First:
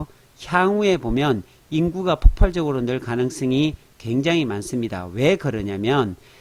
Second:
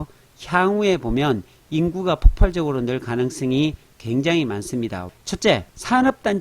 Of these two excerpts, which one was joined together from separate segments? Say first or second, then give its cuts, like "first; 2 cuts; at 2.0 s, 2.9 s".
second; 1 cut; at 5.1 s